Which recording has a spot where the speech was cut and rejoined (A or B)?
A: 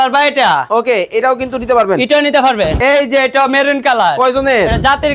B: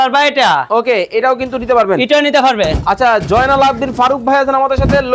A